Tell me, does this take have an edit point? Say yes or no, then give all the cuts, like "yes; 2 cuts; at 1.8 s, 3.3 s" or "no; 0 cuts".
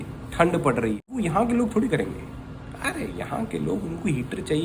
yes; 1 cut; at 1.1 s